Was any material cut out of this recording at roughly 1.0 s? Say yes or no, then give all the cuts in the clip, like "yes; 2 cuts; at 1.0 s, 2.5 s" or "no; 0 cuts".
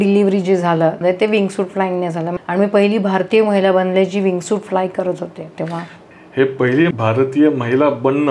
yes; 2 cuts; at 1.0 s, 2.3 s